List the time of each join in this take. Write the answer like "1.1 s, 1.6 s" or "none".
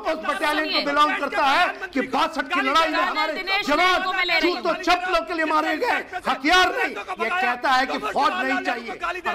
none

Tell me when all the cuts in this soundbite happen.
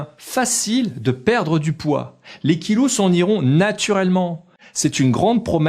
4.5 s

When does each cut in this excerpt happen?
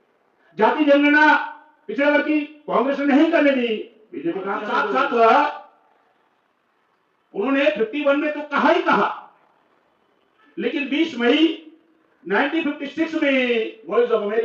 4.6 s

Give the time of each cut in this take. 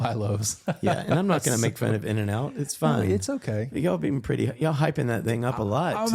none

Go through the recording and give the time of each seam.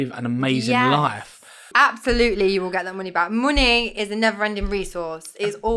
1.7 s

